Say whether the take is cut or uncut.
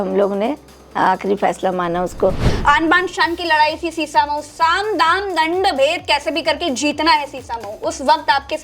cut